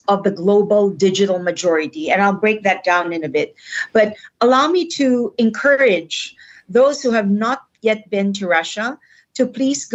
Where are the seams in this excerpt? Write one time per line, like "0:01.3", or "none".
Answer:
none